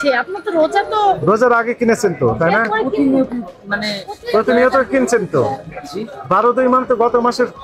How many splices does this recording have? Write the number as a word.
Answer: zero